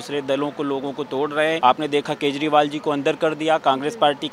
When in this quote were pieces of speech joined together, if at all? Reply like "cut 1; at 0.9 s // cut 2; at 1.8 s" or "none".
cut 1; at 1.6 s